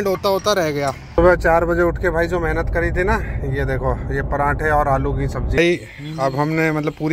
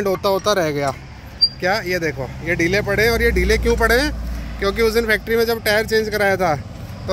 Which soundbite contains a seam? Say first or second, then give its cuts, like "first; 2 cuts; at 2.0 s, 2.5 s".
first; 2 cuts; at 1.2 s, 5.6 s